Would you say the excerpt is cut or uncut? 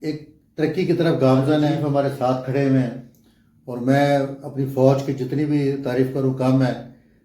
cut